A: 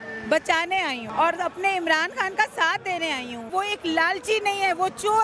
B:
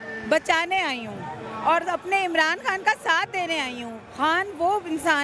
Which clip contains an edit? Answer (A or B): A